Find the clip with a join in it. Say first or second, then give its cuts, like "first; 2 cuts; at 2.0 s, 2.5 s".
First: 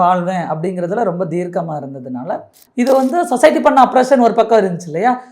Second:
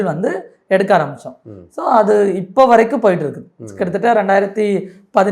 first; 1 cut; at 2.6 s